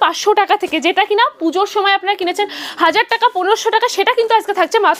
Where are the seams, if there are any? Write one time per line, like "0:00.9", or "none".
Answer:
none